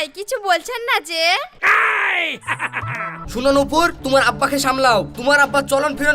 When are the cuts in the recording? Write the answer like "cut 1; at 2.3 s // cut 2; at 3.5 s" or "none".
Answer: cut 1; at 3.2 s